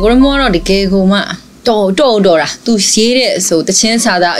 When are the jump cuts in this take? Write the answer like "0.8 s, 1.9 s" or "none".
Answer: none